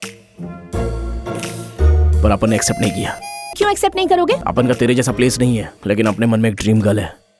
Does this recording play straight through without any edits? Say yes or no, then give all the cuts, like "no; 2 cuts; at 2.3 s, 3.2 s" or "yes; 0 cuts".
no; 3 cuts; at 3.5 s, 4.4 s, 5.7 s